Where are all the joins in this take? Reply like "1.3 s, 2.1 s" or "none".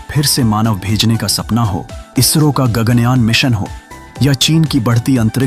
1.9 s